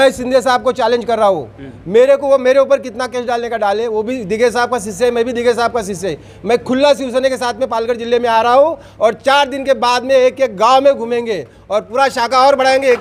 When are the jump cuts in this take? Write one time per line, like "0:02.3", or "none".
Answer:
none